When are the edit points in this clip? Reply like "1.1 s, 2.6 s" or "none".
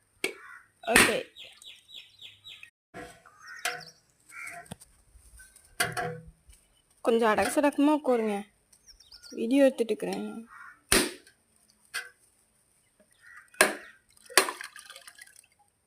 2.8 s